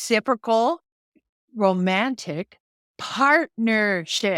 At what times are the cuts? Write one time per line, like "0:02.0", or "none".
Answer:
none